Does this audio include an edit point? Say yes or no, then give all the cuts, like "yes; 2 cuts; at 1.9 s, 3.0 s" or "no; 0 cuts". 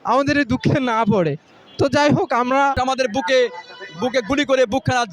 yes; 1 cut; at 2.8 s